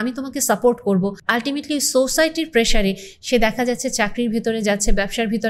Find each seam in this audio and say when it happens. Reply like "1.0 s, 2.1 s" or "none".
1.2 s